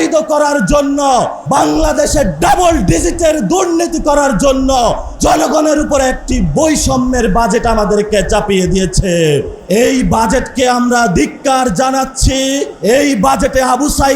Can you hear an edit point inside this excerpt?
yes; 4 cuts; at 1.4 s, 5.1 s, 9.5 s, 12.7 s

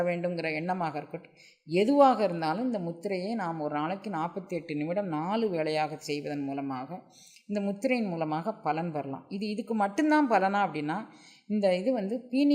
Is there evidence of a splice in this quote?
no; 0 cuts

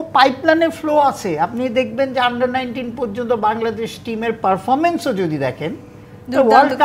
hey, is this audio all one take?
yes; 0 cuts

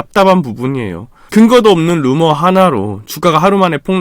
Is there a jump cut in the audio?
no; 0 cuts

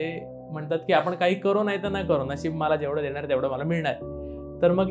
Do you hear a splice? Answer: no; 0 cuts

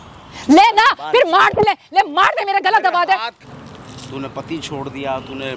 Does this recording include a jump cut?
yes; 1 cut; at 3.4 s

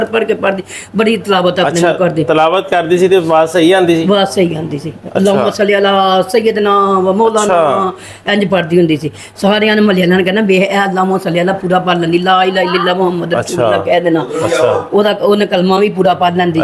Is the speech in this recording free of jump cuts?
yes; 0 cuts

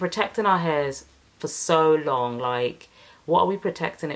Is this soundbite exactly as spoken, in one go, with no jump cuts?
yes; 0 cuts

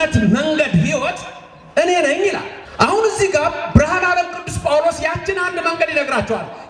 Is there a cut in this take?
yes; 1 cut; at 2.6 s

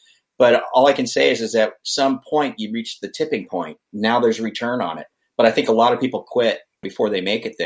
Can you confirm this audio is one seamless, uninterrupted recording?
no; 2 cuts; at 3.9 s, 6.8 s

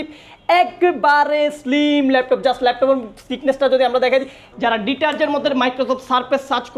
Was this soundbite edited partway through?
yes; 1 cut; at 4.4 s

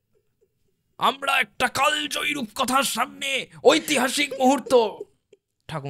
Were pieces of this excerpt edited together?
no; 0 cuts

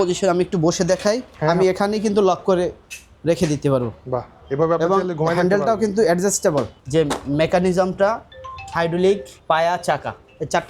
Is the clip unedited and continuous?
no; 3 cuts; at 1.4 s, 6.8 s, 9.3 s

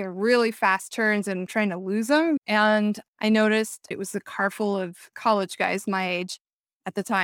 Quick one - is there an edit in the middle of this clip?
yes; 4 cuts; at 1.5 s, 2.4 s, 3.8 s, 5.1 s

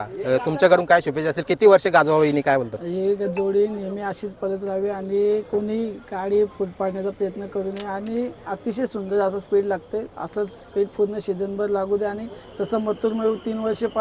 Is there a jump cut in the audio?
no; 0 cuts

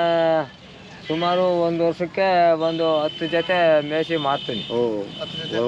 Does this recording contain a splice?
no; 0 cuts

